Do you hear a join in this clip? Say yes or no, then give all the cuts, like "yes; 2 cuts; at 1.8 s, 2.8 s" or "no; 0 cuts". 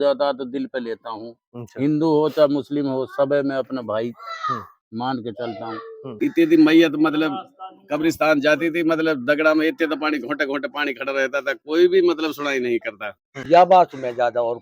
yes; 2 cuts; at 6.1 s, 13.5 s